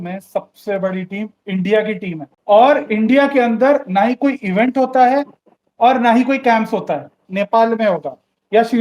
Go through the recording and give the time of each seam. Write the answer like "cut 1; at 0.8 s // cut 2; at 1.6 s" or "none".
cut 1; at 2.3 s // cut 2; at 7.2 s